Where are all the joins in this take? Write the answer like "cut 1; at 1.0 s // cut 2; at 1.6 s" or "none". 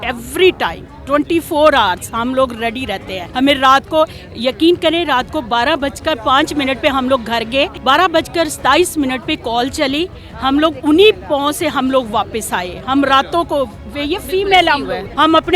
none